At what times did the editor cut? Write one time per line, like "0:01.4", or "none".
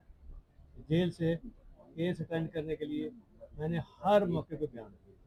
none